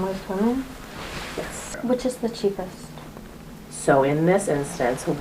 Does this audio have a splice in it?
yes; 1 cut; at 1.8 s

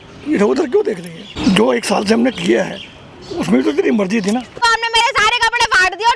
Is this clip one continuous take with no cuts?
no; 2 cuts; at 1.3 s, 4.6 s

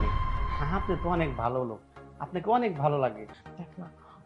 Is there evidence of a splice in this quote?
yes; 1 cut; at 3.2 s

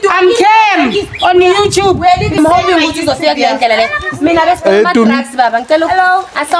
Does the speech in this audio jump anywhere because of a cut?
yes; 1 cut; at 2.4 s

